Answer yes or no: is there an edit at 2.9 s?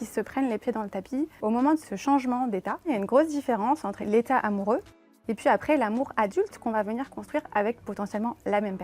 yes